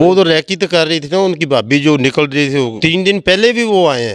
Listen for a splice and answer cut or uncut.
cut